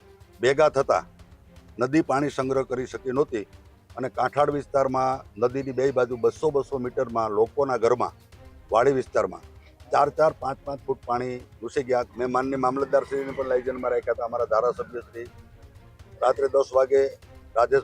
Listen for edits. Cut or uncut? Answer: cut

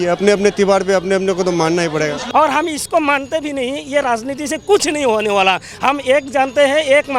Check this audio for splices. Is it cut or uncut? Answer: cut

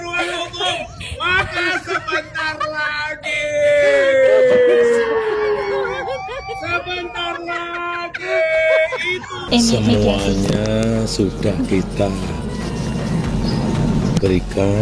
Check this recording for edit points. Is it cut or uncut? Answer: cut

